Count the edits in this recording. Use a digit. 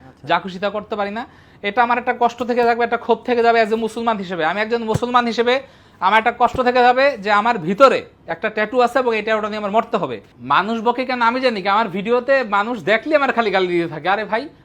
1